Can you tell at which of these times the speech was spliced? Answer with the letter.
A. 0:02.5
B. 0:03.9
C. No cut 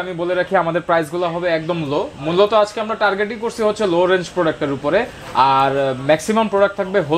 C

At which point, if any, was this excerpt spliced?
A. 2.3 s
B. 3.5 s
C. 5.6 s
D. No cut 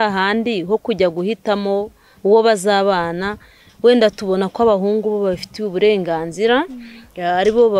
D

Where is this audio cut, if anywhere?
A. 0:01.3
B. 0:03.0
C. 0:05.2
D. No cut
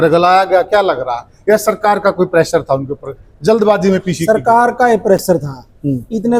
D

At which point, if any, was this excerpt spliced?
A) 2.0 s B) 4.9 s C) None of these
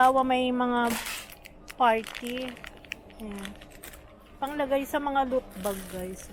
C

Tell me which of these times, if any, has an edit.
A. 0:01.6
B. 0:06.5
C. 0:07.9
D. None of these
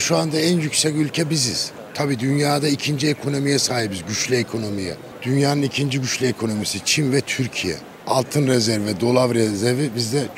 D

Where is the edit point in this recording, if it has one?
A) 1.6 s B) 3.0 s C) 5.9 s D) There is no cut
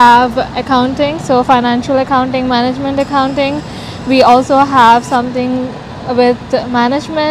D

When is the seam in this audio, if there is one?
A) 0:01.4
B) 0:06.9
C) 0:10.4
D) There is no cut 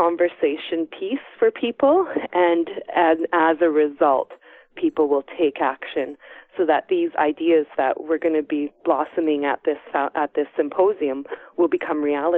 D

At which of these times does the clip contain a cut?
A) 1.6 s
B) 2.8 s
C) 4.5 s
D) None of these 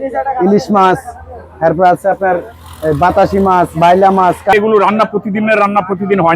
C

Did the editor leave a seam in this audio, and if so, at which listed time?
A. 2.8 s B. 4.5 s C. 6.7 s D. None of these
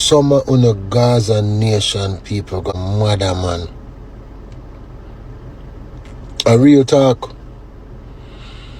A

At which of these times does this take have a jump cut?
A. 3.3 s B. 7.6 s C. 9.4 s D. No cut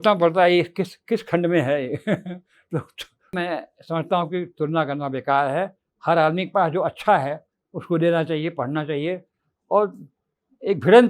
A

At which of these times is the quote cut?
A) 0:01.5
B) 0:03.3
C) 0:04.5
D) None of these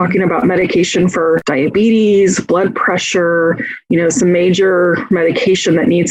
A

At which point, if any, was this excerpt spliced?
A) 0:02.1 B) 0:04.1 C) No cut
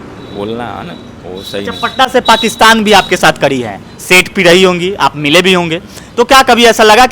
C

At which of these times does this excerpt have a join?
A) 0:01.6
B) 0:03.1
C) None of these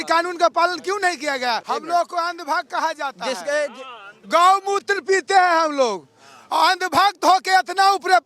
A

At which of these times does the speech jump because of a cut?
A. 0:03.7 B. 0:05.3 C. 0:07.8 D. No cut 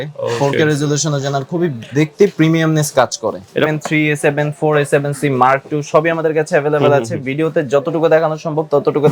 A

